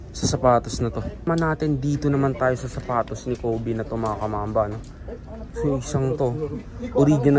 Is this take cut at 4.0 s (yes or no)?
no